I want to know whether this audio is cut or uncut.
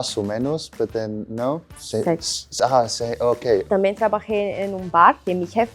cut